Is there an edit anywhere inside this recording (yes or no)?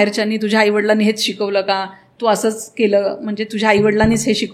no